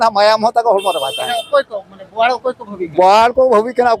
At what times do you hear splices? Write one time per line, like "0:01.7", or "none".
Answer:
none